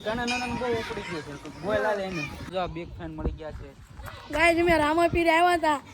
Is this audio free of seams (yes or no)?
no